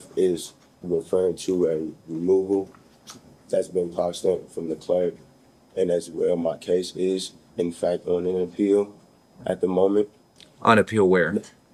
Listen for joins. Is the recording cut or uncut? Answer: uncut